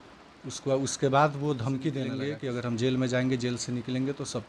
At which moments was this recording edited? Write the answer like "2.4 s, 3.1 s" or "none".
2.2 s